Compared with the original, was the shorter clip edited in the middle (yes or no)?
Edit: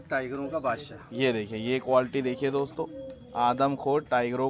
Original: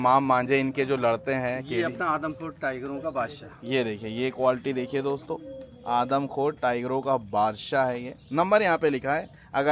no